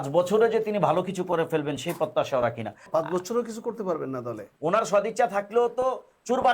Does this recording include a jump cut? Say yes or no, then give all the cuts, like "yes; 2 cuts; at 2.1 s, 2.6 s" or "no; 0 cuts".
yes; 2 cuts; at 2.8 s, 4.5 s